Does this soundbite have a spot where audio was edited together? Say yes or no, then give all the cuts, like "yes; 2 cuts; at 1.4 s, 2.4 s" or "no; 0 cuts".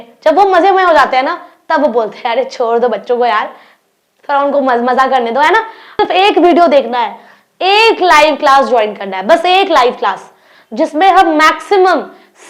yes; 1 cut; at 6.0 s